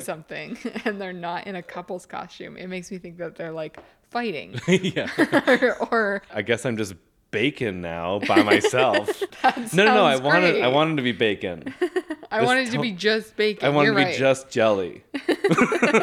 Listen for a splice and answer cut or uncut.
cut